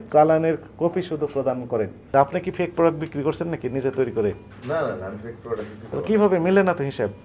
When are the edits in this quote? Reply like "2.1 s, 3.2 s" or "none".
2.0 s